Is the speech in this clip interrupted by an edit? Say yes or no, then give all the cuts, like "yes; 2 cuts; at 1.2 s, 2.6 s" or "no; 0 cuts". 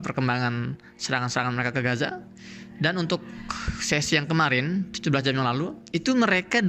yes; 1 cut; at 5.8 s